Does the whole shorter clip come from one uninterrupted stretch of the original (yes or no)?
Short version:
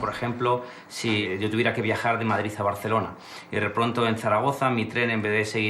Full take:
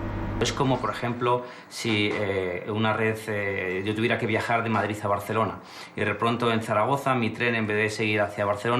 no